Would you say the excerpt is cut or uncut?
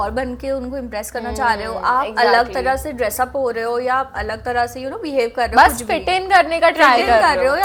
uncut